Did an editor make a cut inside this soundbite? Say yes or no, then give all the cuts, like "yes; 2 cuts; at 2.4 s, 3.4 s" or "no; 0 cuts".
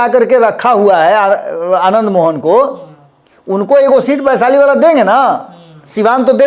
no; 0 cuts